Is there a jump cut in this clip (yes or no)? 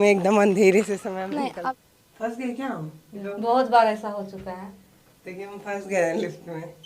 yes